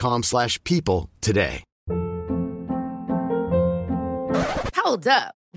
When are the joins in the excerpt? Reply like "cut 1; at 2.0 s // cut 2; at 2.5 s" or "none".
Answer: cut 1; at 1.7 s